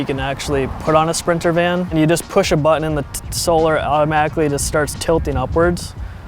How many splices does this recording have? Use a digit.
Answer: 1